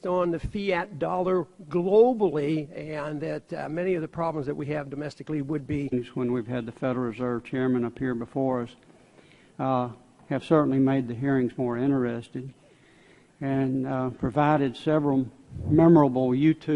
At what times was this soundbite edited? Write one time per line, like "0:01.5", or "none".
none